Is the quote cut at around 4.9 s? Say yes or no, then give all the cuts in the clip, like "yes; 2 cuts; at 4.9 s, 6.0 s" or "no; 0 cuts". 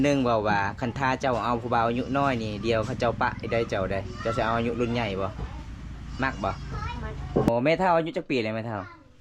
no; 1 cut; at 7.5 s